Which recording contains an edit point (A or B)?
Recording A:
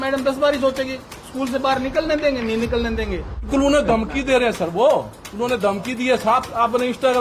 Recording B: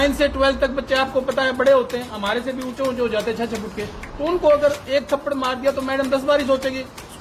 A